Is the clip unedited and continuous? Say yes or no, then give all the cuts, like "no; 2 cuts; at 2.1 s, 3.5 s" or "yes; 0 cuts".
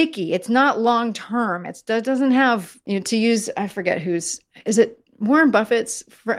no; 1 cut; at 2.7 s